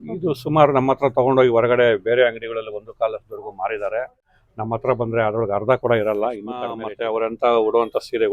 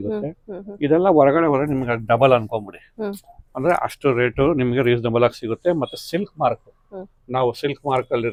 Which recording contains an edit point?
first; 2 cuts; at 4.3 s, 6.9 s

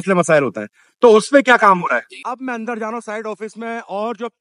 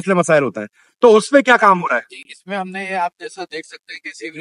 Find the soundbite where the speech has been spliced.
first; 1 cut; at 2.1 s

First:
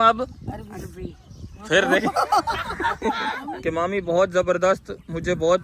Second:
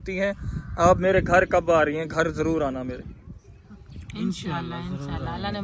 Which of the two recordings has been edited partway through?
first; 1 cut; at 3.5 s

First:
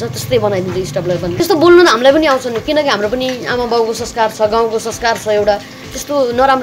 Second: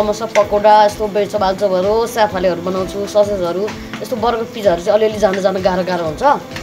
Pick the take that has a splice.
first; 1 cut; at 1.4 s

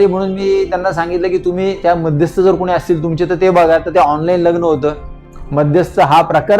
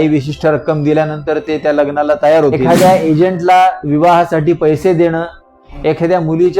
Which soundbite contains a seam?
second; 1 cut; at 2.6 s

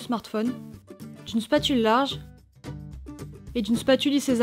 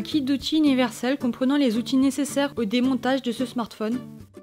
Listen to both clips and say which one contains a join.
first; 2 cuts; at 2.1 s, 3.5 s

